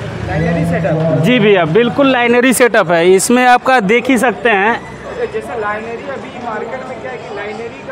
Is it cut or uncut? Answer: uncut